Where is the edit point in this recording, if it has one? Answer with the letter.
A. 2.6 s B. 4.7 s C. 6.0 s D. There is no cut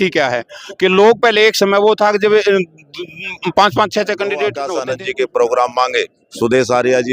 B